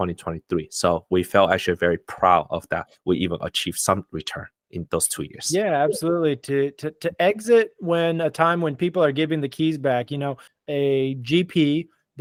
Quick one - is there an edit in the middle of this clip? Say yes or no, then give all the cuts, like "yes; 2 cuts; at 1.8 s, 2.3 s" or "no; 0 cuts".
no; 0 cuts